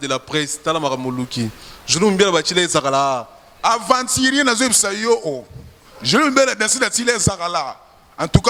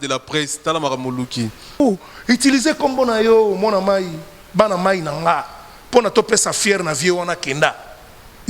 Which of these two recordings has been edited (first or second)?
second